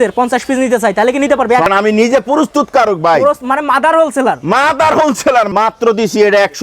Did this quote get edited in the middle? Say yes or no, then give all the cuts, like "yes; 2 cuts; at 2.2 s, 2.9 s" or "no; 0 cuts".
yes; 2 cuts; at 1.7 s, 5.5 s